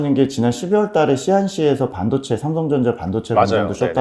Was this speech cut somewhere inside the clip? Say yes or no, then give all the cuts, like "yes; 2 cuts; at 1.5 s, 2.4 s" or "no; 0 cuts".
no; 0 cuts